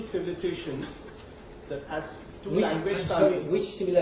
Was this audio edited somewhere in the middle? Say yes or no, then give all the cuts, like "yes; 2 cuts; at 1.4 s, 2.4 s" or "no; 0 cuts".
yes; 1 cut; at 1.1 s